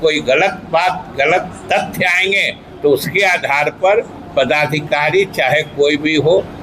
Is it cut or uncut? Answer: uncut